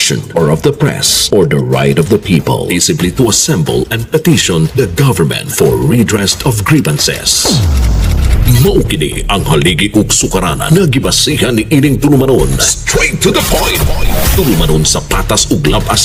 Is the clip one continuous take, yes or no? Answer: yes